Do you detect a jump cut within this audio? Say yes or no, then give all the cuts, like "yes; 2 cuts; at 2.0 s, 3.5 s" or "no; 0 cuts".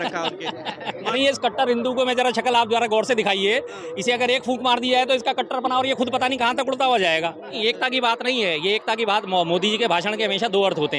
yes; 2 cuts; at 1.1 s, 7.6 s